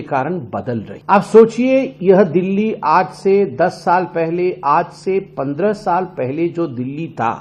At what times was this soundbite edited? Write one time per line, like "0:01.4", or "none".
0:00.9